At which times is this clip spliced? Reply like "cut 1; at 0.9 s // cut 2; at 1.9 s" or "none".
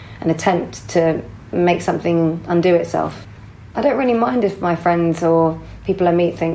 cut 1; at 3.2 s

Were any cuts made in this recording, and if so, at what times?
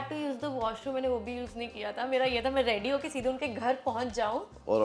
none

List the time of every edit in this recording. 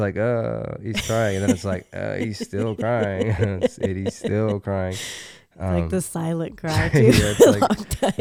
none

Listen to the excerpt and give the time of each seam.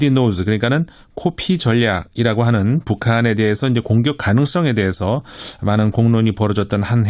cut 1; at 2.1 s

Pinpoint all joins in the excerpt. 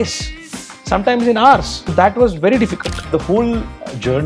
cut 1; at 1.8 s // cut 2; at 3.0 s

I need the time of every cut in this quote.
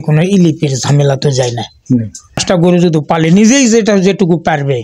cut 1; at 2.4 s

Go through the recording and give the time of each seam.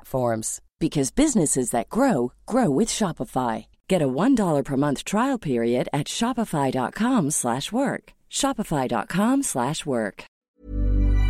cut 1; at 10.3 s

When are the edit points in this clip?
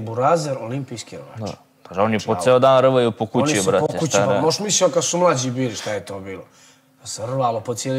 none

